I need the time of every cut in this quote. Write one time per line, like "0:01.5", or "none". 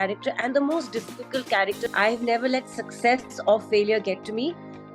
0:01.9